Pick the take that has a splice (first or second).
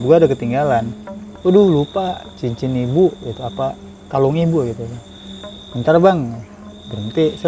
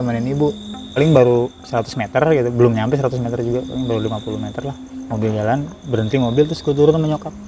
second